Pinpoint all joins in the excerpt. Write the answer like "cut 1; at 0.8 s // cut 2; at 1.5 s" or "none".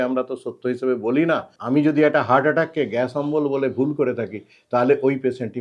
cut 1; at 1.5 s